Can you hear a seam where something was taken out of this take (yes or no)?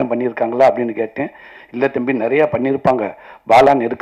no